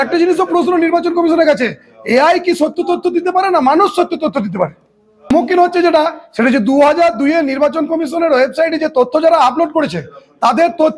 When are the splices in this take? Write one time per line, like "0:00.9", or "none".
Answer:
none

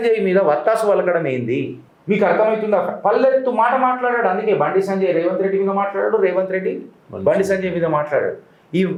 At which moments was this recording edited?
none

